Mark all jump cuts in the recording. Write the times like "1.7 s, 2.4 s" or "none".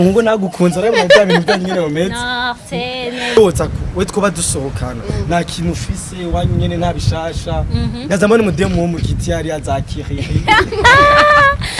3.4 s